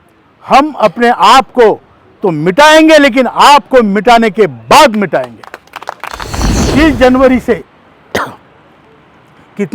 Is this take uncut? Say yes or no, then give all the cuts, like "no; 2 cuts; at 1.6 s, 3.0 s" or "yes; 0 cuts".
no; 1 cut; at 6.7 s